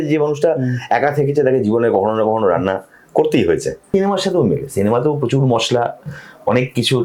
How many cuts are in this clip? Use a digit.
1